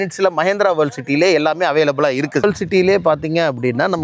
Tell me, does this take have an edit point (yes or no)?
yes